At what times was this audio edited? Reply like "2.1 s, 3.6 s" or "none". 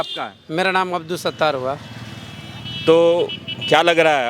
none